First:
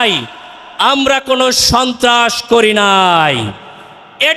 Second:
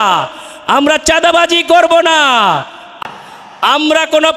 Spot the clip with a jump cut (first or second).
second